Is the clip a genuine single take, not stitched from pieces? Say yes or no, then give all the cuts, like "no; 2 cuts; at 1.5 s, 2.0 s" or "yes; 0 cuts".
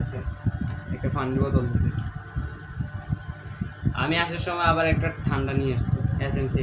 yes; 0 cuts